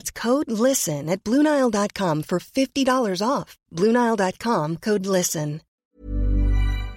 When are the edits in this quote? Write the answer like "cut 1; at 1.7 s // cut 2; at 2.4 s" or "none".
cut 1; at 5.8 s